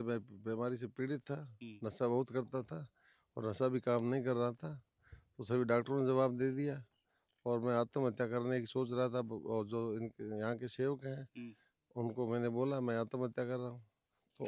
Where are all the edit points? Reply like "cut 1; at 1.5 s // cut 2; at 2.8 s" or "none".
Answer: none